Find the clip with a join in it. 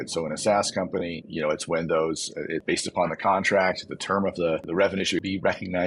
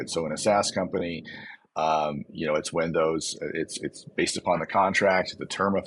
first; 3 cuts; at 1.2 s, 2.6 s, 4.9 s

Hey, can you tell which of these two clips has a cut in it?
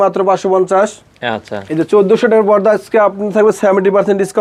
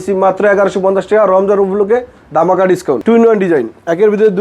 second; 1 cut; at 3.0 s

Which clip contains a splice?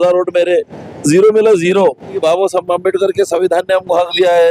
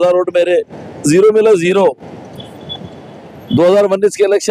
first; 1 cut; at 2.2 s

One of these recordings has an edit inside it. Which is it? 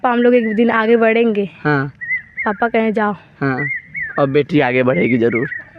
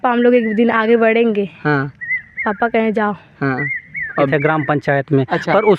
second; 1 cut; at 4.3 s

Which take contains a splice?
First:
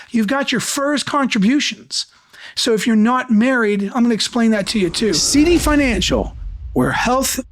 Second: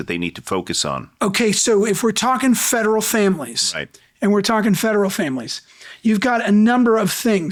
first; 1 cut; at 5.2 s

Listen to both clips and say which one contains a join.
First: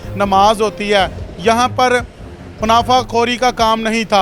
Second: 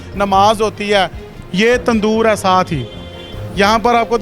second; 1 cut; at 1.3 s

